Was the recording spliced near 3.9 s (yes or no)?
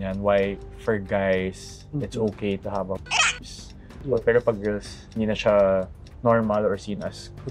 yes